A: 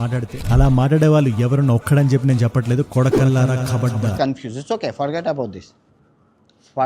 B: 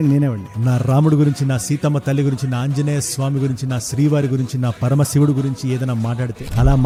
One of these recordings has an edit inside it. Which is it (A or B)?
A